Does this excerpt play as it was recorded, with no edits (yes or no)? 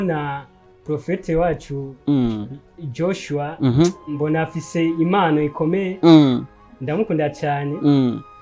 yes